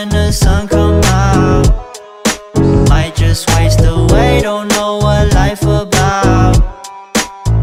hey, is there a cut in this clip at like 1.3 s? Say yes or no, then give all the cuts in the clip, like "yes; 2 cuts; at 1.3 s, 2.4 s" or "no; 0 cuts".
no; 0 cuts